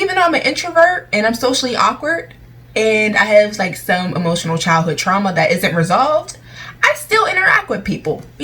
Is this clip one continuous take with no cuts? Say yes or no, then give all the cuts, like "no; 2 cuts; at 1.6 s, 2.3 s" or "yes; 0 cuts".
yes; 0 cuts